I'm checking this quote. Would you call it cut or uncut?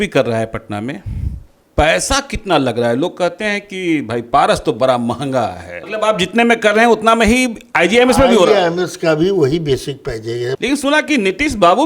cut